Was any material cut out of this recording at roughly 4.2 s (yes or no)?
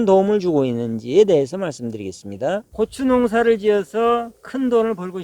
no